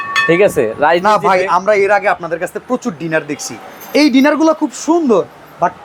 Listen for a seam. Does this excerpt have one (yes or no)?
no